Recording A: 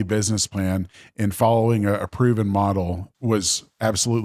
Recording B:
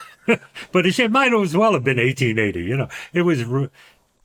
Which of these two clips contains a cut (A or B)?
A